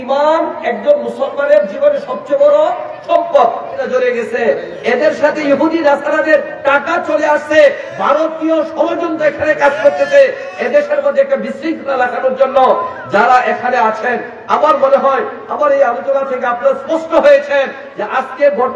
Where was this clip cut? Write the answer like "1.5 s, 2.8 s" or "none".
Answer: 3.7 s

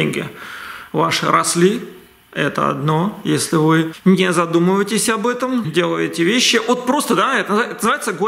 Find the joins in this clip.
5.7 s

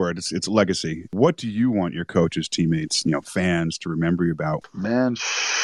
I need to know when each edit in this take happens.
1.1 s, 4.6 s

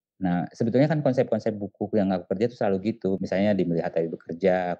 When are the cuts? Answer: 3.2 s

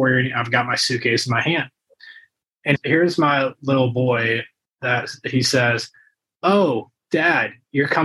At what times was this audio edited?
none

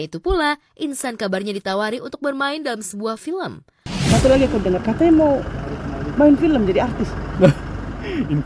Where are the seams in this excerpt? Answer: 3.7 s

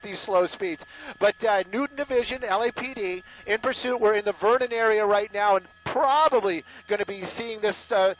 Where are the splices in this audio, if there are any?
7.2 s

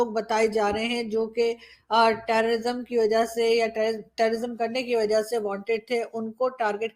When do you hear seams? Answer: none

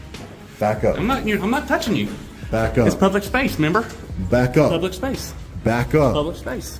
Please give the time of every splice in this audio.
none

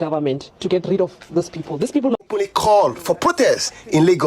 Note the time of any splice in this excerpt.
2.2 s

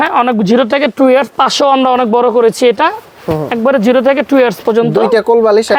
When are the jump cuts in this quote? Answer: none

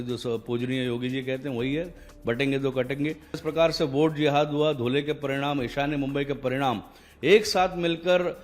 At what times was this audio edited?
3.4 s

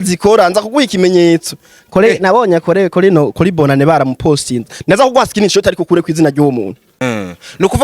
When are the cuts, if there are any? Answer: 6.9 s

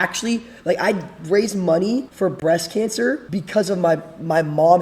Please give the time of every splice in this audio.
2.1 s, 3.2 s

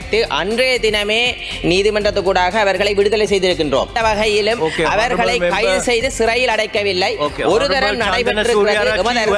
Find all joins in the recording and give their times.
4.0 s

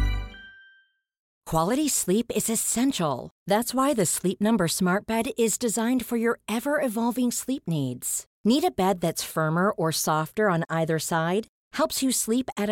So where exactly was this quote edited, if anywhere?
1.4 s

